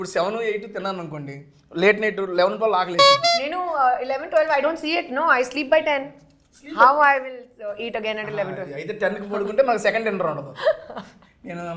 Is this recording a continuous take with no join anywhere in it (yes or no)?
yes